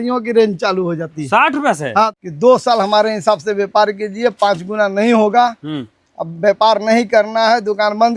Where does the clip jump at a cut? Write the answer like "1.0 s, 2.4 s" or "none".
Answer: 2.1 s